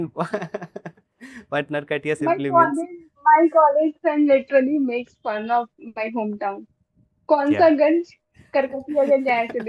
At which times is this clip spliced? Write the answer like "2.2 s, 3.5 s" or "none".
none